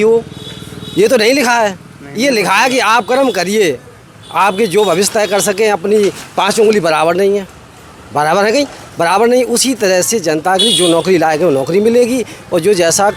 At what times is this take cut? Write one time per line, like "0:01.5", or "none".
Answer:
none